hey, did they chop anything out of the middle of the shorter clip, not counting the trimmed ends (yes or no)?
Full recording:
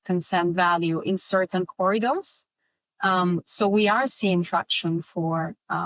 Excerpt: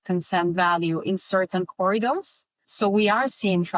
yes